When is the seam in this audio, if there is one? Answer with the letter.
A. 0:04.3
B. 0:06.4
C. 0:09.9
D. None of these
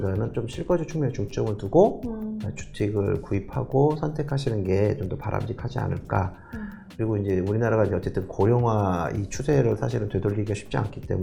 D